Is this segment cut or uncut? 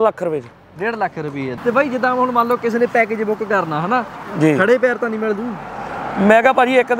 cut